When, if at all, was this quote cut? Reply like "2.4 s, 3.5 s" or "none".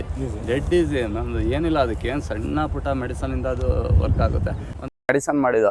4.7 s

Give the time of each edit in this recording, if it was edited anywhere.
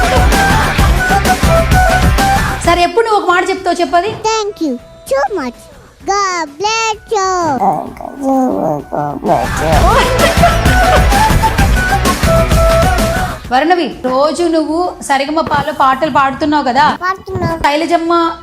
none

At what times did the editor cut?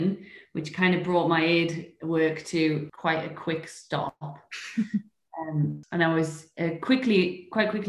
2.9 s, 5.8 s

